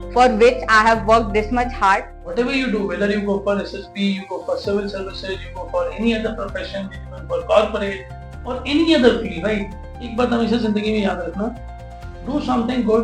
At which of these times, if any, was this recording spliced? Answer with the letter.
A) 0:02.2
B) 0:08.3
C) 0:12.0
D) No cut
A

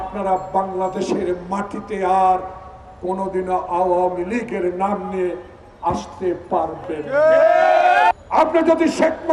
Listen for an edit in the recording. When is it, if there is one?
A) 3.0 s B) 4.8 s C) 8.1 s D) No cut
C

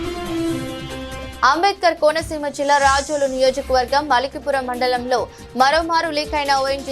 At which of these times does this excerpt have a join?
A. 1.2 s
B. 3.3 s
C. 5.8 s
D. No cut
A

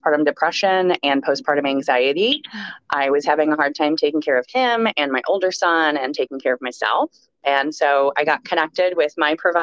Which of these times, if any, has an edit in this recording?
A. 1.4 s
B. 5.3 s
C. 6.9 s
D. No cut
D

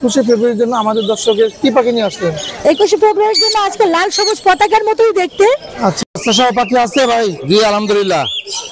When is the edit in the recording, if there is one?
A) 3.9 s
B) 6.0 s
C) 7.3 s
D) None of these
B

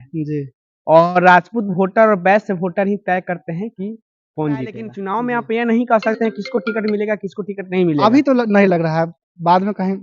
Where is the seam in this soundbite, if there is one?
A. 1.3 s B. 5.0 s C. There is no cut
B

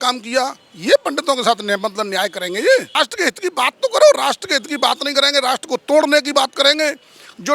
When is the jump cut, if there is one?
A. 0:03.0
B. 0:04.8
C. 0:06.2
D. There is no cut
A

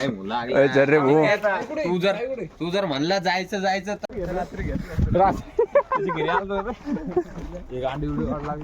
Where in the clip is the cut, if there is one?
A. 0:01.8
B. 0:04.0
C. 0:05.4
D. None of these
B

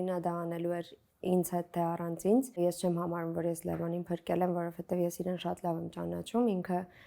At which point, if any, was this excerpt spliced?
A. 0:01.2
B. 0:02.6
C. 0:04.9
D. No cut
B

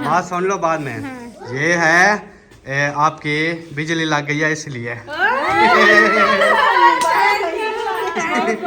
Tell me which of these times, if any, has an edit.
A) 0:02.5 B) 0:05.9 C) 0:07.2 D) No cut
D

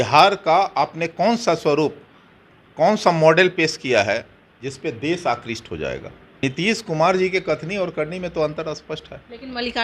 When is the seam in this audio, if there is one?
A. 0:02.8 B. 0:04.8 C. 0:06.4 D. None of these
C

